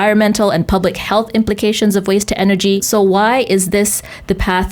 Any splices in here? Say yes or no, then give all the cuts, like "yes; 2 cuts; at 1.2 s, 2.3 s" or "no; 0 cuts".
yes; 1 cut; at 2.8 s